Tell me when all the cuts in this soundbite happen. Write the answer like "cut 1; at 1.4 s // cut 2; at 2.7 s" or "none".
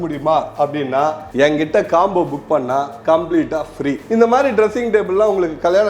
cut 1; at 4.0 s